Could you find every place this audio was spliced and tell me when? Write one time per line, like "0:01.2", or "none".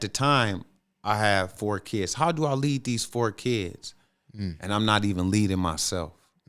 none